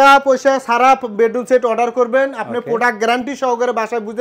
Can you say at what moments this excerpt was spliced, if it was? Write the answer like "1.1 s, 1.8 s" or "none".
none